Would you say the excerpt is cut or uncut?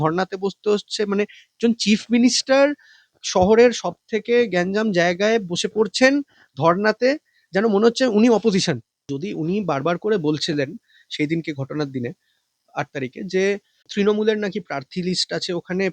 cut